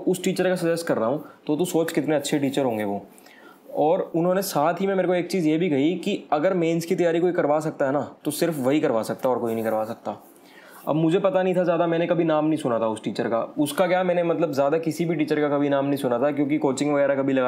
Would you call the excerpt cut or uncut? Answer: uncut